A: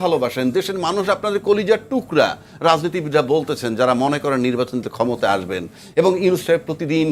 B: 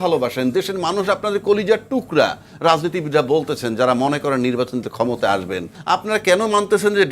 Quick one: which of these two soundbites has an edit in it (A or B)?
B